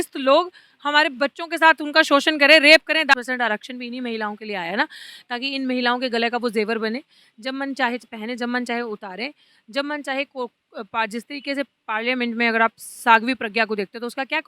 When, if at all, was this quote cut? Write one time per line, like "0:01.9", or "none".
0:03.1